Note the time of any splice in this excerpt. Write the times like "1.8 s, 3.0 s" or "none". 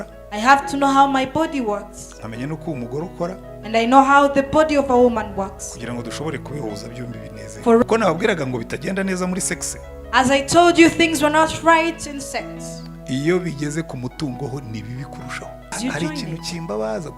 7.8 s, 15.7 s